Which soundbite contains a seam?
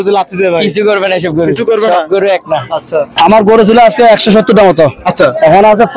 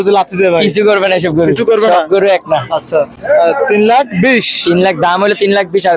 first; 1 cut; at 3.1 s

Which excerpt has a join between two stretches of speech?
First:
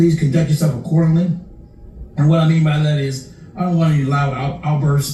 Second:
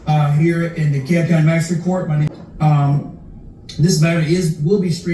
second; 1 cut; at 2.3 s

